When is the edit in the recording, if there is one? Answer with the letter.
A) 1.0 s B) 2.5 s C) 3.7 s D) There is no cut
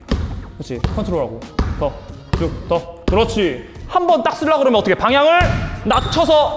C